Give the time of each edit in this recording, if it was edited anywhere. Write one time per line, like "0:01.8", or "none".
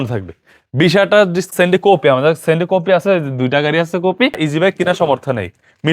0:01.5
0:04.4